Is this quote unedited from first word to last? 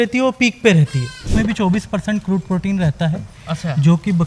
no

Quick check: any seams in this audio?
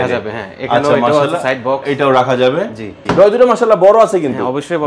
yes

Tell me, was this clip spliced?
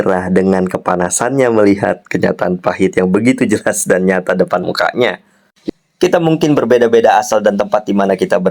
yes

